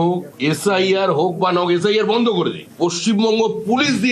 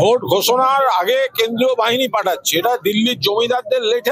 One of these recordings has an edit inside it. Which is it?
first; 1 cut; at 2.6 s

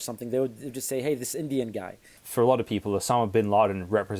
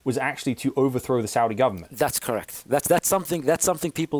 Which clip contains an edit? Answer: first; 1 cut; at 2.1 s

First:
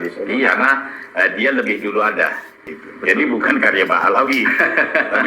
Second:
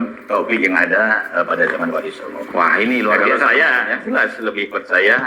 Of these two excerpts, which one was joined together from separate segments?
first; 1 cut; at 2.7 s

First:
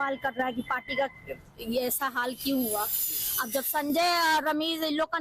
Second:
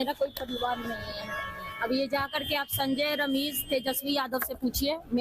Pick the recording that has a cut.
second; 1 cut; at 1.0 s

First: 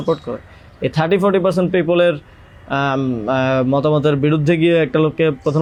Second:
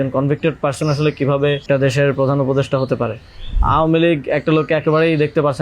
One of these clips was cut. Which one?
second; 2 cuts; at 1.6 s, 3.6 s

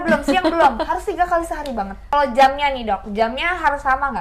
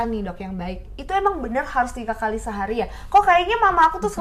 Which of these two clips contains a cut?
first; 1 cut; at 2.1 s

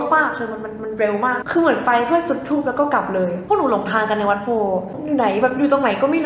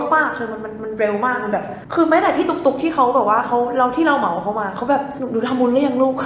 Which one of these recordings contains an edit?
first; 3 cuts; at 1.4 s, 3.4 s, 4.9 s

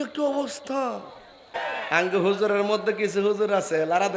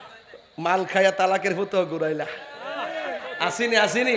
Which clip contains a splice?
first; 1 cut; at 1.6 s

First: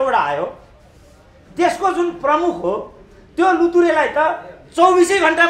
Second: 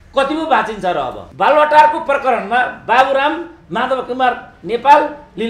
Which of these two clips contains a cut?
second; 1 cut; at 1.2 s

